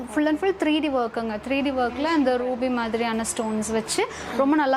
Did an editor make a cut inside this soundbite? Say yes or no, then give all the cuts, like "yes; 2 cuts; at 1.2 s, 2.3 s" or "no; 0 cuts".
no; 0 cuts